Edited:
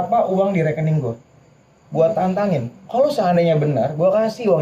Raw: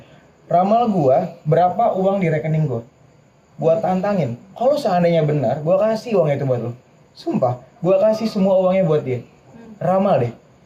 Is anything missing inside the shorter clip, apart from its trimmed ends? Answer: no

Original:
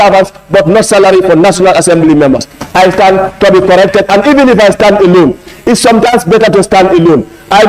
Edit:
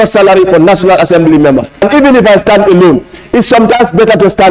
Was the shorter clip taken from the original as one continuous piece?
no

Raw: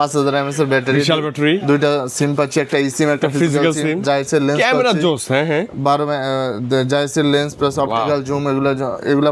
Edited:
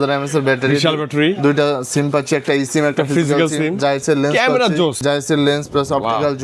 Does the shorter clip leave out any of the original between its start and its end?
yes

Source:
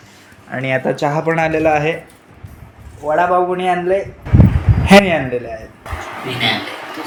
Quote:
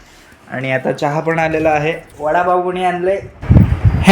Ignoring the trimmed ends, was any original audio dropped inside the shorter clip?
yes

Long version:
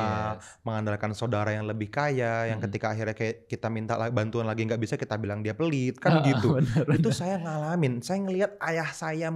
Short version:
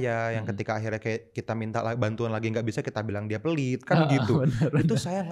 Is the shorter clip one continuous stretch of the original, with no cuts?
yes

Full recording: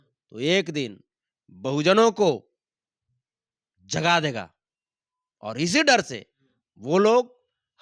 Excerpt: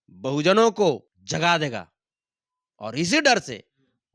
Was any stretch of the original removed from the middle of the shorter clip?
yes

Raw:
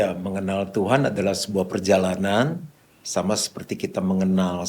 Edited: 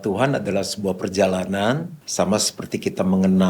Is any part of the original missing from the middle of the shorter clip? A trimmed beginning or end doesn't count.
yes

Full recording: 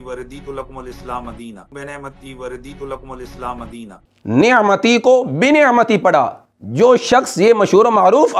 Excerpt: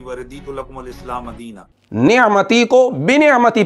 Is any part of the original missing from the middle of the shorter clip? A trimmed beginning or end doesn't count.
yes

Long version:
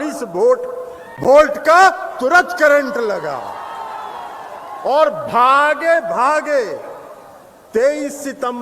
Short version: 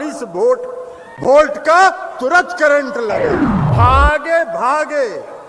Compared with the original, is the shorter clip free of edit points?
no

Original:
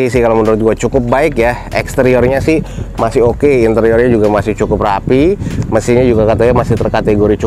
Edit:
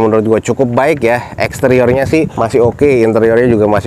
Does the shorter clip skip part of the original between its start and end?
yes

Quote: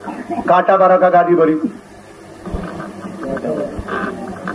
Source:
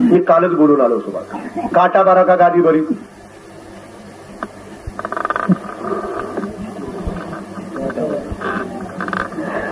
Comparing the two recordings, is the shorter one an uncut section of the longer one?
no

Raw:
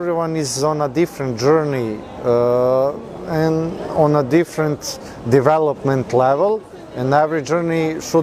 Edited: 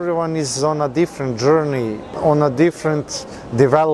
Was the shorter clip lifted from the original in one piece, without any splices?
no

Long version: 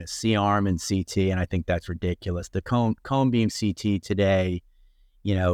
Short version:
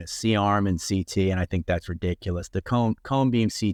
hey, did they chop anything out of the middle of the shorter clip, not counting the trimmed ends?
no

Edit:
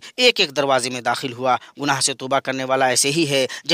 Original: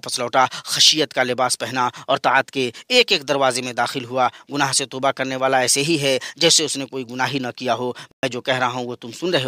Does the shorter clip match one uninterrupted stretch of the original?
yes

